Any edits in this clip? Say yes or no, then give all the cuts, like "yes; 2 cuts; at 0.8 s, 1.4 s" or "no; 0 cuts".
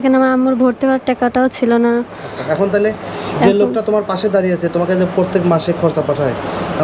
no; 0 cuts